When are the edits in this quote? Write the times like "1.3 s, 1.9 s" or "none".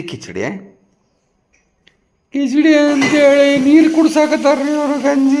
none